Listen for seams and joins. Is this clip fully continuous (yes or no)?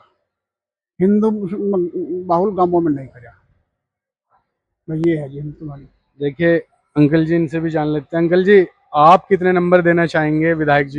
yes